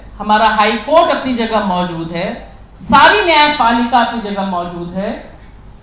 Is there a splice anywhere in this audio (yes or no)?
no